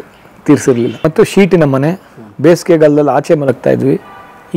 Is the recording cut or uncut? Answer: uncut